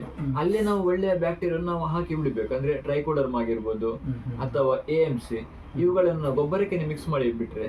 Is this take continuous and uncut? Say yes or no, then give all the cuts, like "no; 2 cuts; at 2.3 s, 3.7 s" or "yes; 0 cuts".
yes; 0 cuts